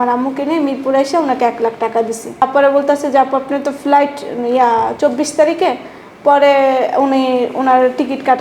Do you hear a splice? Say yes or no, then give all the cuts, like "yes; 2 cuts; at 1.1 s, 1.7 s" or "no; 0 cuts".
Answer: yes; 1 cut; at 2.4 s